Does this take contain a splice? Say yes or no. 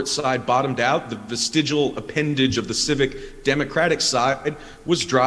no